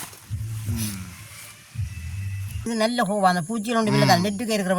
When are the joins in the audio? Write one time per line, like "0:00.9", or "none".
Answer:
0:02.7